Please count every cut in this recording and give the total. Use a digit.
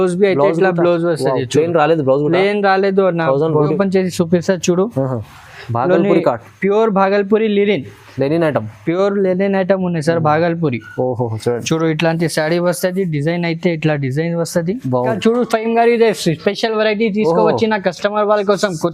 2